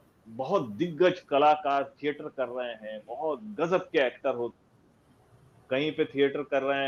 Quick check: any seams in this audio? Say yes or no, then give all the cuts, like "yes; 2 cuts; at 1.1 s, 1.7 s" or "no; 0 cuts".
no; 0 cuts